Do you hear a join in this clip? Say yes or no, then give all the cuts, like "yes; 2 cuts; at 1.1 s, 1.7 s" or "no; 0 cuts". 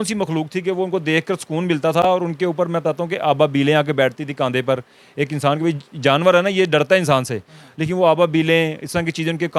no; 0 cuts